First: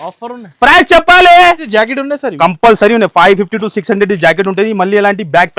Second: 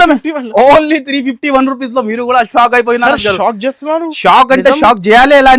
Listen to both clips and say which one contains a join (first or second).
first